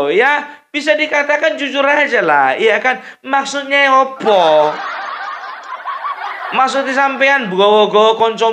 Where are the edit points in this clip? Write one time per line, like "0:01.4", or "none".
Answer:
none